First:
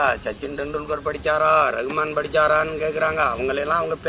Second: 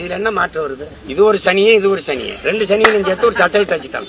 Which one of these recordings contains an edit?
second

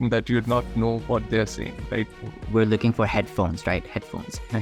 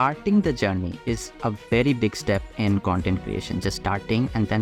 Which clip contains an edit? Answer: first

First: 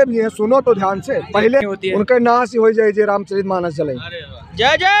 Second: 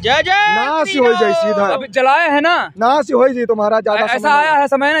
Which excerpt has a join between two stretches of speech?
first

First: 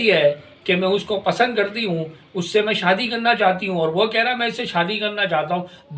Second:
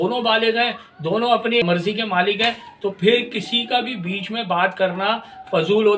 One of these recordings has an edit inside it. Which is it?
second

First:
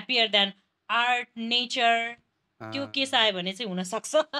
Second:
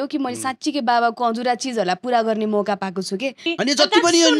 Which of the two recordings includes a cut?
second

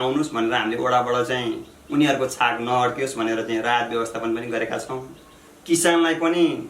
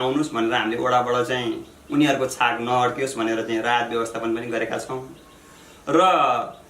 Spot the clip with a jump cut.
first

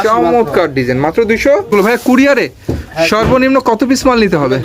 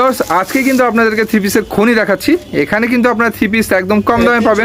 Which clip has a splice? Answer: first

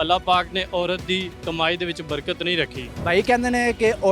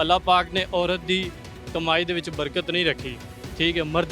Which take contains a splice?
first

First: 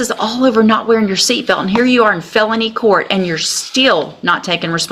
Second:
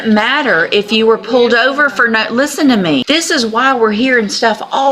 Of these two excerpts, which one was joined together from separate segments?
second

